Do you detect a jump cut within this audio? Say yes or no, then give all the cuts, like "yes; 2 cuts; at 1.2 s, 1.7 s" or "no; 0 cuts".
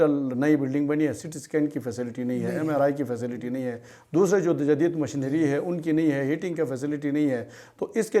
no; 0 cuts